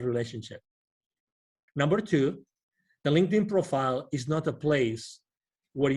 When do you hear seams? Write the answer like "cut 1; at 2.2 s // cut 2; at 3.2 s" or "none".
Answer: cut 1; at 1.6 s